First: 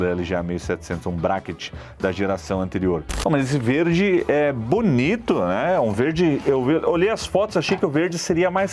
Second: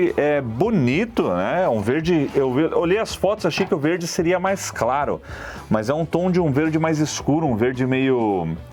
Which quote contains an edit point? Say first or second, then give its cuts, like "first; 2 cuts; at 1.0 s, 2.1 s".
first; 1 cut; at 3.1 s